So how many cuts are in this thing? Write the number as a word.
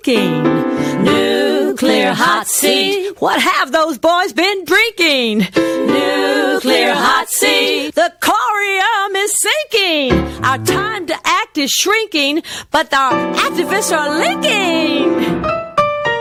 zero